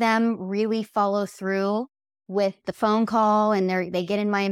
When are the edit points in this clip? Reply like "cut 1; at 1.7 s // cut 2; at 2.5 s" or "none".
cut 1; at 2.7 s